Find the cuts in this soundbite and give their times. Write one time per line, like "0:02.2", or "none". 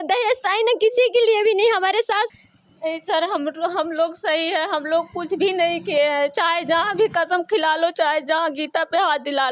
0:02.3